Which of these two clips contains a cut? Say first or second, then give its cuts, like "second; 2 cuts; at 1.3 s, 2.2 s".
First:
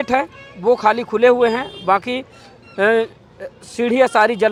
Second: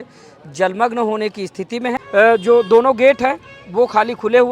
second; 1 cut; at 2.0 s